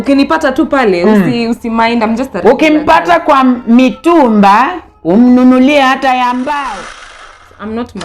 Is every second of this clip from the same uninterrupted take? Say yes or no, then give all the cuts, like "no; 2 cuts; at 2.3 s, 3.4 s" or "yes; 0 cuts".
no; 1 cut; at 7.0 s